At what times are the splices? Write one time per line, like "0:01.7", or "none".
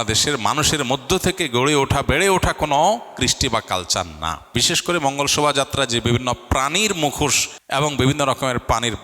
0:04.4
0:07.5